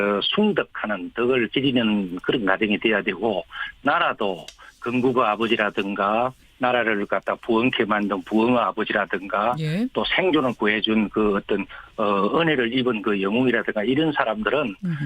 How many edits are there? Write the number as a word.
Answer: one